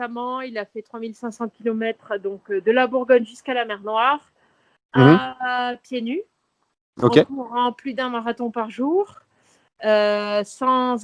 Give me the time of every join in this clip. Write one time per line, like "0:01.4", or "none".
none